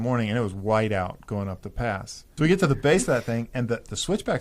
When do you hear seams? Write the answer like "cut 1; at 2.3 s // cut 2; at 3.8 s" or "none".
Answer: cut 1; at 2.3 s